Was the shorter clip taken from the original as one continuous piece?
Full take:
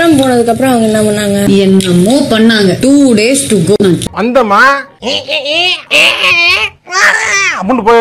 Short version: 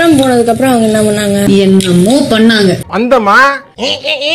no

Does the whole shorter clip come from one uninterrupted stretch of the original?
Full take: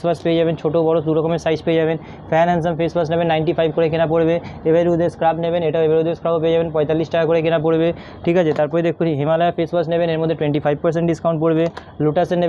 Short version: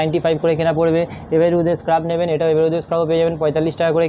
yes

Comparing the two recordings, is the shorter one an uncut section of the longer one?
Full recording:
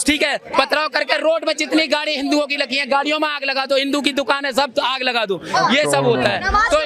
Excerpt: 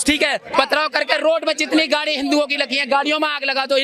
yes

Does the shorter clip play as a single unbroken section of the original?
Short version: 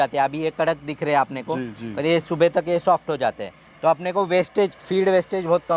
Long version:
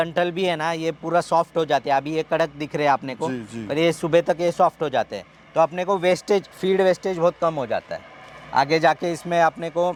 yes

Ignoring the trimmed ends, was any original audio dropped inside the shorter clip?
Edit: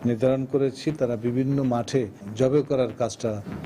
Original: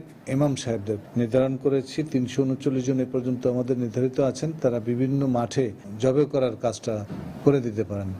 yes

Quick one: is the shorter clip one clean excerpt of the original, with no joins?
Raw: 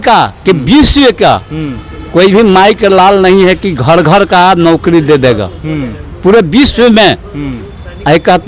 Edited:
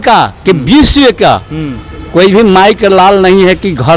yes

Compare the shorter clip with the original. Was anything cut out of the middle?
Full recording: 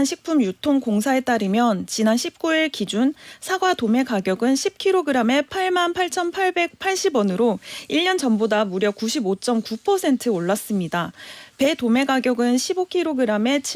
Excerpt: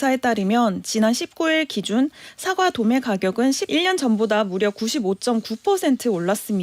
yes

